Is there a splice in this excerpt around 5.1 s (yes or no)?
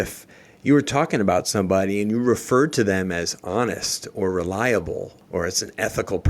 yes